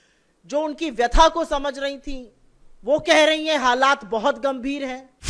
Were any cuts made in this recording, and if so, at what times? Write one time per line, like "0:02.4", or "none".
none